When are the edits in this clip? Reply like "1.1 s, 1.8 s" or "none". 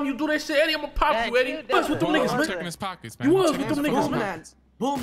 1.7 s